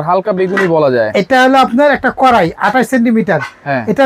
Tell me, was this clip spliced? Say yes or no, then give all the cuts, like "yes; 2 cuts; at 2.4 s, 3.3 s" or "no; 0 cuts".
no; 0 cuts